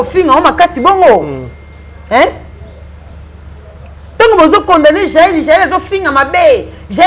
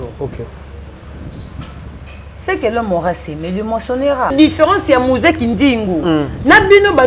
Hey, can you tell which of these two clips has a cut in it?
second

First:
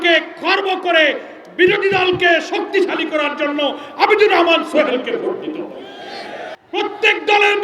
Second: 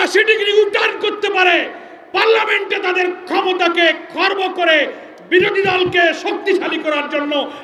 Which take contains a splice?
first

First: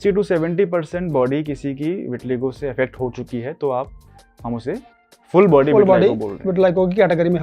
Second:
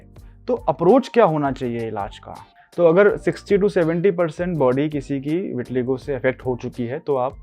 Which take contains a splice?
second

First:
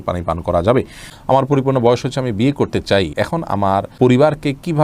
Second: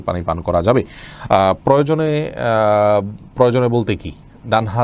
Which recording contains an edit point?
first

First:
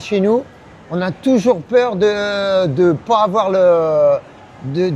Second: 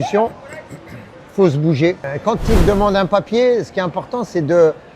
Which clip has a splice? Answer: second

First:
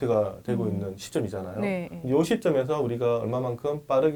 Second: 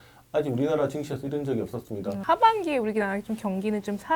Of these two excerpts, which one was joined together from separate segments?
second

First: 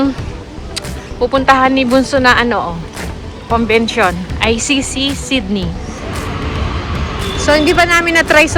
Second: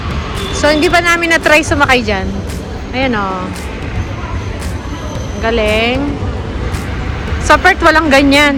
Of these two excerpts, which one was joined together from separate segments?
first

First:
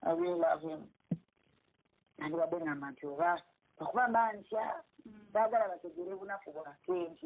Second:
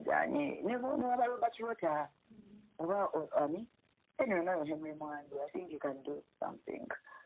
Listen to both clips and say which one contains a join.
first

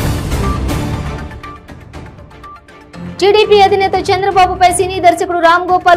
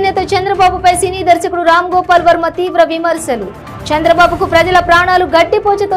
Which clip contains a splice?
first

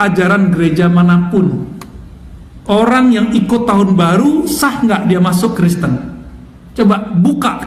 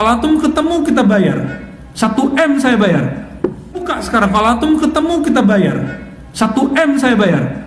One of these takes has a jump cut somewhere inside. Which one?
second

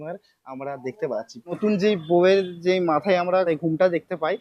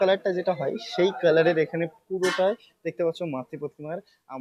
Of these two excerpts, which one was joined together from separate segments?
first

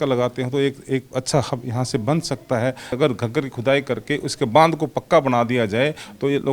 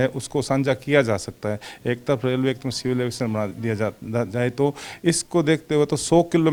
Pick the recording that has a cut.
first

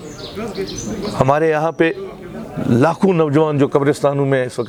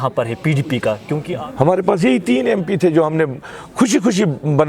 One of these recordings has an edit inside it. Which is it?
second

